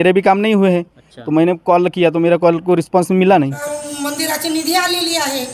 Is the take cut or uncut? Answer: cut